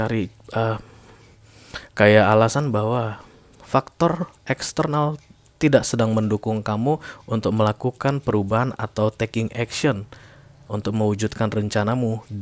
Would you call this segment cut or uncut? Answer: uncut